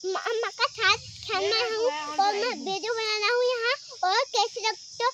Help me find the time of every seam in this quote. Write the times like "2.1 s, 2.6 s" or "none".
none